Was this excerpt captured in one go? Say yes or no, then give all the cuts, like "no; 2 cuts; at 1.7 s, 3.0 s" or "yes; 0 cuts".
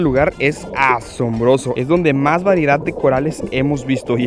yes; 0 cuts